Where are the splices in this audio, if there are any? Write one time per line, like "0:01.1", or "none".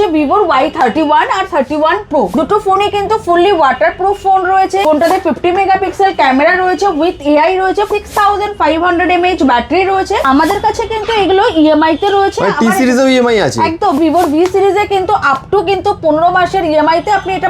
0:02.3
0:04.8
0:07.9
0:10.2
0:14.0